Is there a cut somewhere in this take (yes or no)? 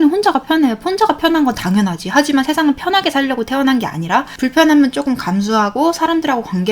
yes